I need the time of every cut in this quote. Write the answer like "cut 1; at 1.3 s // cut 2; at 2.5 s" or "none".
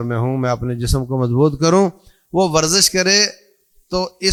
none